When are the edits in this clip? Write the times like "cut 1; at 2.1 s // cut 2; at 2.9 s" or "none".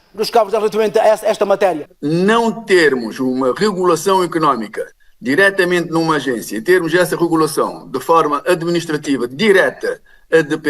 cut 1; at 1.9 s